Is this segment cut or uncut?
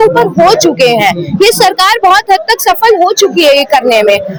uncut